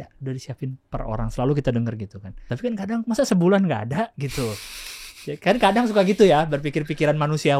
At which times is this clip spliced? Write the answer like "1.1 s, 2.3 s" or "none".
2.5 s

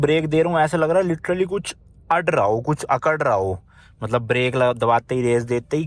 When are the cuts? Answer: none

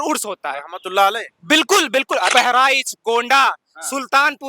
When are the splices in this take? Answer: 2.3 s

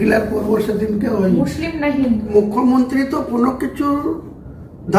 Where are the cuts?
2.3 s

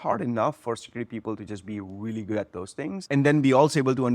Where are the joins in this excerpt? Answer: 3.0 s

